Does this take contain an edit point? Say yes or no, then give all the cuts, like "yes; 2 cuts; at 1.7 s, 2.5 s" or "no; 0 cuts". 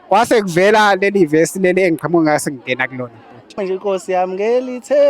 yes; 1 cut; at 3.5 s